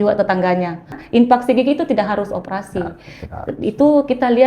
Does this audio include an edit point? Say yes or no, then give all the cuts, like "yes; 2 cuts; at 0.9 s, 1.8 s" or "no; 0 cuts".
yes; 1 cut; at 1.0 s